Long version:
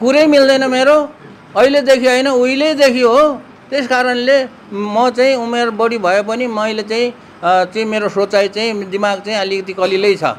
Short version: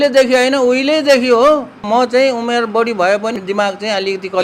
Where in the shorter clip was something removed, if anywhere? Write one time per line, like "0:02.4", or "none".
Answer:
0:01.8
0:03.4